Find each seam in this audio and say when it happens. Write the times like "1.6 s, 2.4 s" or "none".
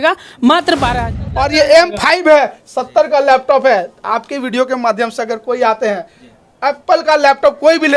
1.1 s

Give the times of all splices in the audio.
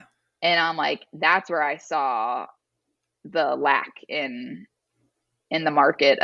none

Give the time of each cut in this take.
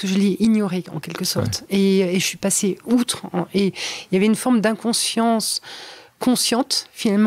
none

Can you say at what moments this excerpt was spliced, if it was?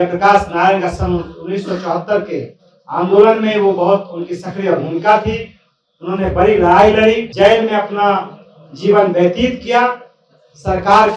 7.3 s

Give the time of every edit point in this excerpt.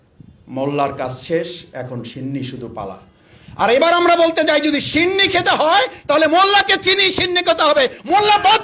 none

